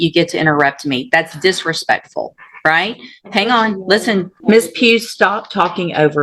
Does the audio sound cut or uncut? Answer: cut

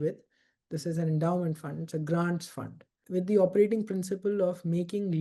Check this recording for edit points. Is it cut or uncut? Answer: cut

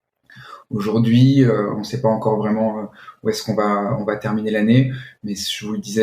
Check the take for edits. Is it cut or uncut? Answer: uncut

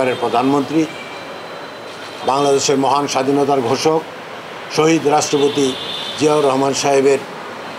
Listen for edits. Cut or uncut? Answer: uncut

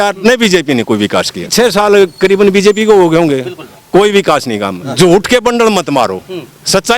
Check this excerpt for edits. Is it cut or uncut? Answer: cut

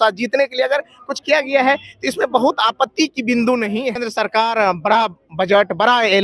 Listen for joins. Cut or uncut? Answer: cut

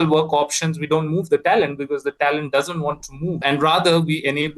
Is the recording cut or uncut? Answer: cut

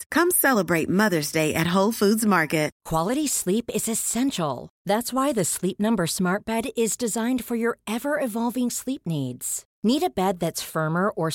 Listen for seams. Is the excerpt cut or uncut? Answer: cut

